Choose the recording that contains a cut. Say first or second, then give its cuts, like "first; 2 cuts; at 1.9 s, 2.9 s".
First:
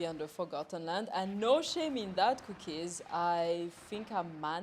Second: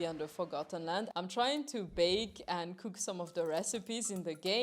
second; 1 cut; at 1.1 s